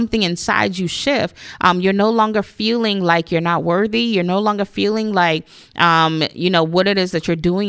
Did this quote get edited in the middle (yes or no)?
no